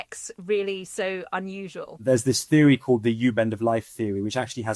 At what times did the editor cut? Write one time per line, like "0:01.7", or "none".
0:01.9